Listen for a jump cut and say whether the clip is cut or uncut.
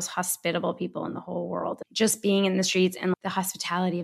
cut